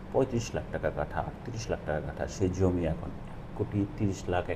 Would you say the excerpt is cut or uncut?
uncut